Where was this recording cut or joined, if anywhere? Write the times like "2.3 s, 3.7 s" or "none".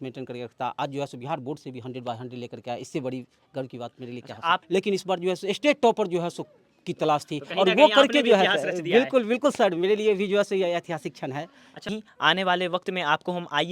4.6 s, 11.9 s